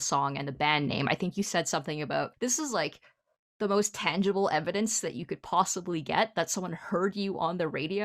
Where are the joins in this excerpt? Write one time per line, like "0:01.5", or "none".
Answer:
0:02.3